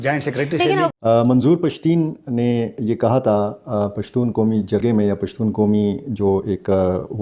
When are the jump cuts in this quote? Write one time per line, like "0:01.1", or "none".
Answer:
0:00.9

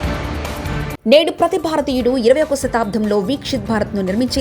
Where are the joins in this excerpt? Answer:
0:00.9

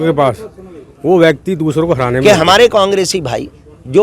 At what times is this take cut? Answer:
0:02.2

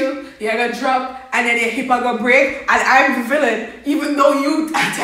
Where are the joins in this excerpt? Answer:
none

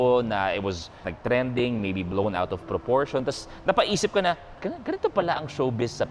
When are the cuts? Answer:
0:01.1
0:04.6

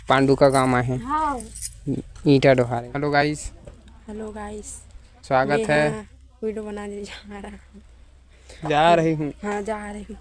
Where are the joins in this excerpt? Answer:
0:02.8

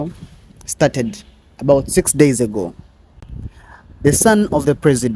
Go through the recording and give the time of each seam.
none

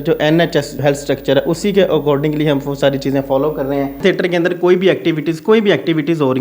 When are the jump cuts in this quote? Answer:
0:00.8
0:03.9

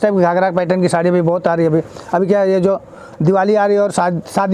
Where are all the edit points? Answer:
none

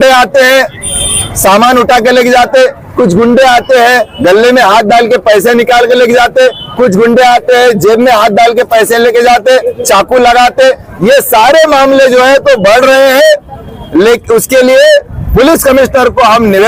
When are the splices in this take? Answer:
none

